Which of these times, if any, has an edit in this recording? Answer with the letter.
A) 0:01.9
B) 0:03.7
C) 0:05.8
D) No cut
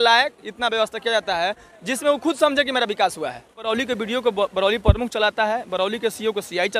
B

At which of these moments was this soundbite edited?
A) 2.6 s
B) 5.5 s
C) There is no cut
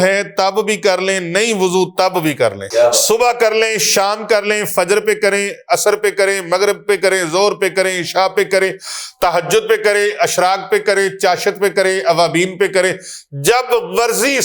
A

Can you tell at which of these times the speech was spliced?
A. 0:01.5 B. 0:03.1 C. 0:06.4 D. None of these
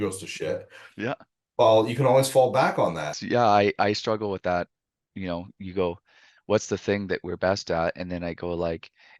B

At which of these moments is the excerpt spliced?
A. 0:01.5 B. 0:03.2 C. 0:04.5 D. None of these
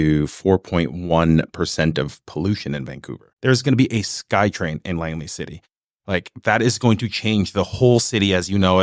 B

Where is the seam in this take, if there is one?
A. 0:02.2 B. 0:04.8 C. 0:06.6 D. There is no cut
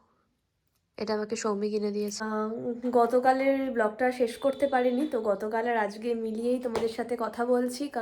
A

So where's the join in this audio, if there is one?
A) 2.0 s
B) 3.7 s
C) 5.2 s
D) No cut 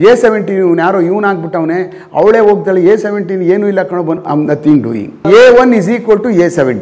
C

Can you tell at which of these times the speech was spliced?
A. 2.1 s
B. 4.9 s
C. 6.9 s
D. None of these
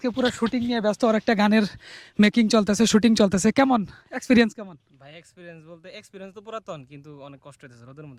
D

